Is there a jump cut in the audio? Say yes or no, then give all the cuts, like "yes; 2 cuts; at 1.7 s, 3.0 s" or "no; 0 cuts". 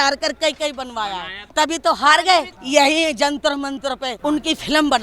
yes; 3 cuts; at 1.4 s, 2.6 s, 4.1 s